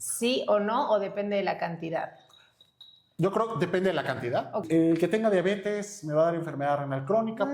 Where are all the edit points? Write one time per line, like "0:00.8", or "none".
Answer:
0:04.6